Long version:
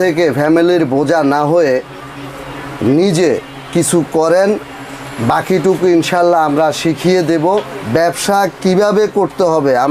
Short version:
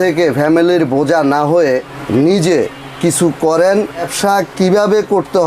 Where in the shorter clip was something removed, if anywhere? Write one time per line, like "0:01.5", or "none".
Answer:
0:02.0
0:04.1